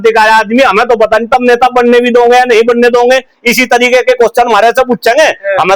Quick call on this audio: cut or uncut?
uncut